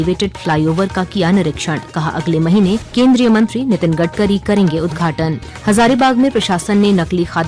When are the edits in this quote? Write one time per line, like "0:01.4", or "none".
0:02.9
0:05.5

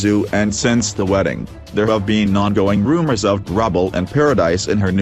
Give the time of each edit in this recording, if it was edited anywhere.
none

